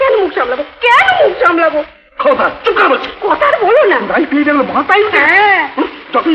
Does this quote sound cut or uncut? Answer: uncut